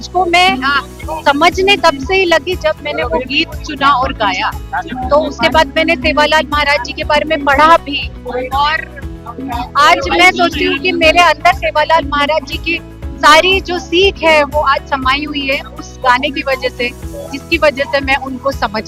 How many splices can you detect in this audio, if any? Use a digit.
0